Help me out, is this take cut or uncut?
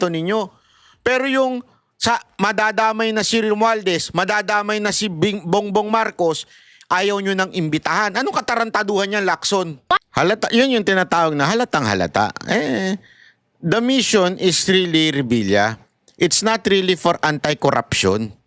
cut